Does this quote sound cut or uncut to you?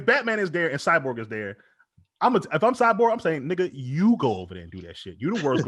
uncut